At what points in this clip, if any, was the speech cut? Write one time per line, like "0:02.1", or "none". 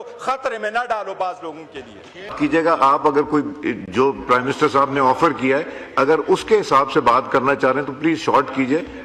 none